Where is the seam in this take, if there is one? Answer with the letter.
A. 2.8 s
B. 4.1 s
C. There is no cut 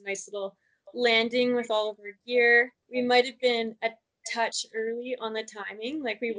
A